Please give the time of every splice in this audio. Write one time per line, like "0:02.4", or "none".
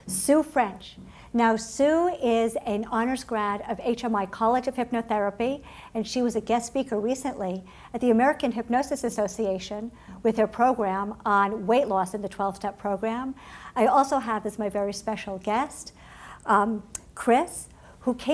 0:05.6

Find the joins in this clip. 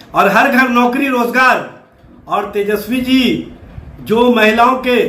none

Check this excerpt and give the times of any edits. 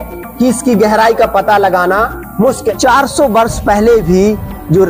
0:02.6

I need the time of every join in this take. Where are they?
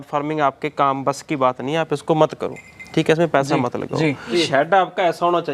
0:04.3

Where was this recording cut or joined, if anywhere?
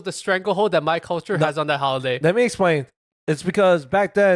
0:02.9

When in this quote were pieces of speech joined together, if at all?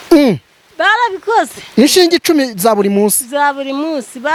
none

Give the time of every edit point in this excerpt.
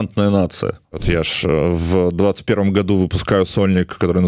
0:00.9

